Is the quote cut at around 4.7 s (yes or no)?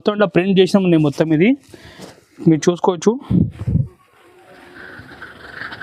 no